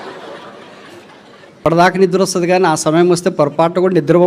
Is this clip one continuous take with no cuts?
no; 1 cut; at 1.6 s

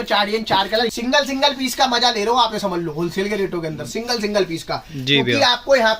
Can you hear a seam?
yes; 1 cut; at 0.9 s

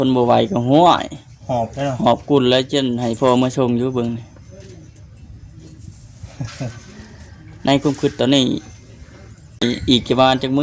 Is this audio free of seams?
no; 1 cut; at 9.6 s

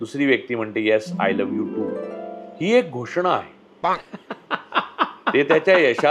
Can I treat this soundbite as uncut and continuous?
yes; 0 cuts

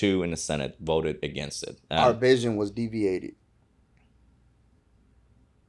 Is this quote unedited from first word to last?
yes; 0 cuts

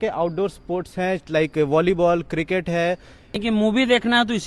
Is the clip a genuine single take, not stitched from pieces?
no; 1 cut; at 3.4 s

